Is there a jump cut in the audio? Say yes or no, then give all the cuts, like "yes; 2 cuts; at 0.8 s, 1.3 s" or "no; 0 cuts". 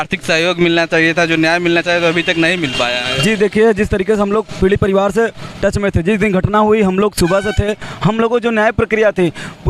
no; 0 cuts